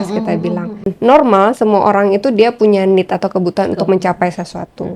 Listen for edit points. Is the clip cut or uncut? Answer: cut